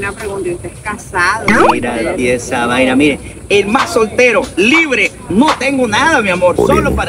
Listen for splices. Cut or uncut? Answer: uncut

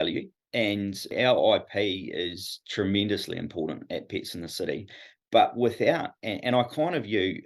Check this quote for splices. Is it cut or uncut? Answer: cut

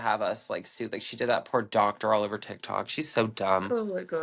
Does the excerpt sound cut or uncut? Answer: uncut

